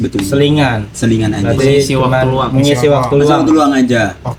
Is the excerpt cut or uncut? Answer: uncut